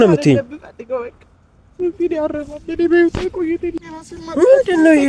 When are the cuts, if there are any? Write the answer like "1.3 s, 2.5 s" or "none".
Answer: 3.8 s